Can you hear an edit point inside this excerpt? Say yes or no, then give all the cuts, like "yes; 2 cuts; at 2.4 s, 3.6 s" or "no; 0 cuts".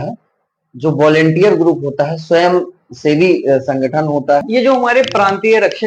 yes; 1 cut; at 4.5 s